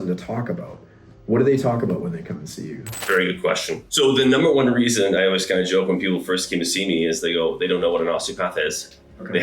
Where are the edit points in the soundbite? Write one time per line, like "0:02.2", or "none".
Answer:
0:03.0
0:03.8